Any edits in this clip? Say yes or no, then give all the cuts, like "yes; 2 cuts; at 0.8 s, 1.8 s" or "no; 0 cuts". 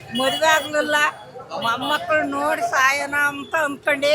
no; 0 cuts